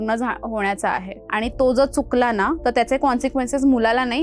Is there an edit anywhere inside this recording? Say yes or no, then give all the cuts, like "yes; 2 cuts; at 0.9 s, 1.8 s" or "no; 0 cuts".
no; 0 cuts